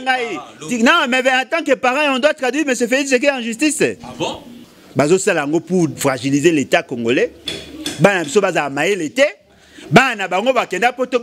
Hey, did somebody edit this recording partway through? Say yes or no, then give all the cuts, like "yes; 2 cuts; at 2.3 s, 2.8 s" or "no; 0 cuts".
yes; 1 cut; at 4.6 s